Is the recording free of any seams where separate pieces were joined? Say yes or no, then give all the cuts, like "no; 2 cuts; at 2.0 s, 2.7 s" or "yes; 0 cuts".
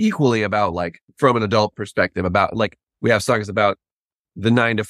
no; 1 cut; at 1.0 s